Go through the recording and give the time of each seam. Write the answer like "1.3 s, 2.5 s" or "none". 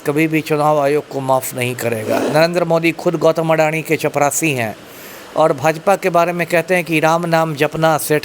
2.2 s